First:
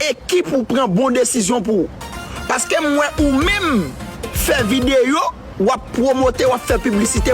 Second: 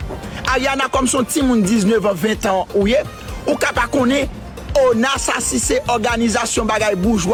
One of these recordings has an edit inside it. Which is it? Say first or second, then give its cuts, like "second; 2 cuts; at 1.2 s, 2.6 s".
first; 1 cut; at 5.1 s